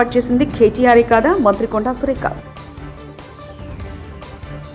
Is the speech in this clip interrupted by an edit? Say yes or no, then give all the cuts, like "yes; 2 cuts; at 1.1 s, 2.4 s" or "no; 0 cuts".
yes; 1 cut; at 2.6 s